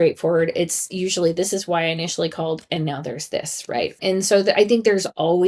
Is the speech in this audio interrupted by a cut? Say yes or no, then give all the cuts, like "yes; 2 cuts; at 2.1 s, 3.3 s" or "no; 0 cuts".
yes; 1 cut; at 4.0 s